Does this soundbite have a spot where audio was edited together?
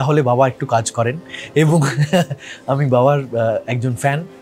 no; 0 cuts

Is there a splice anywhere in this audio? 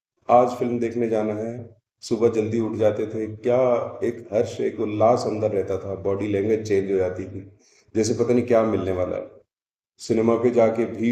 no; 0 cuts

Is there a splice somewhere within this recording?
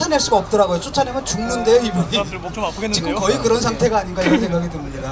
yes; 1 cut; at 3.5 s

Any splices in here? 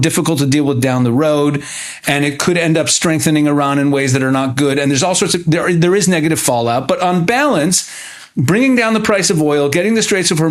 no; 0 cuts

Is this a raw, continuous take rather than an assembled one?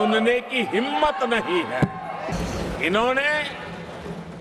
no; 1 cut; at 2.3 s

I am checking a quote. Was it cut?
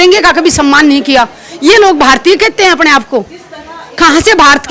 no; 0 cuts

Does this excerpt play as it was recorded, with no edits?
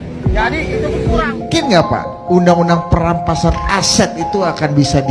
no; 1 cut; at 1.4 s

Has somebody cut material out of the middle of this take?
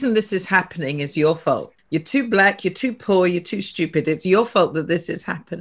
yes; 1 cut; at 1.7 s

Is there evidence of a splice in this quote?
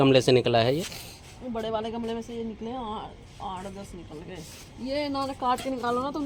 no; 0 cuts

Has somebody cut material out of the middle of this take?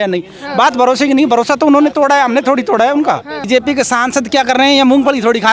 yes; 1 cut; at 3.4 s

